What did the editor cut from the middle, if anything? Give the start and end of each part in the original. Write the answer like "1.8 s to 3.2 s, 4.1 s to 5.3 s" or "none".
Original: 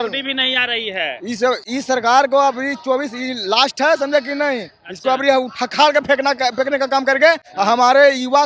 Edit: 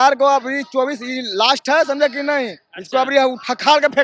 none